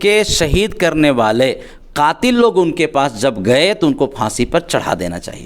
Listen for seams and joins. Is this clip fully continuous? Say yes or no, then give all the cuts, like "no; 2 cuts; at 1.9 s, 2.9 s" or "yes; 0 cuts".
yes; 0 cuts